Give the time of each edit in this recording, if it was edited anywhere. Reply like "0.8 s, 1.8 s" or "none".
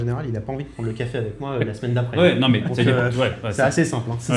none